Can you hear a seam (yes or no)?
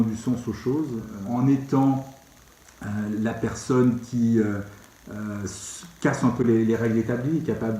yes